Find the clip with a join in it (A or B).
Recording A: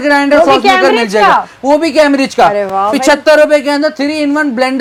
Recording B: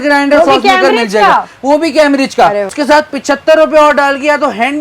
B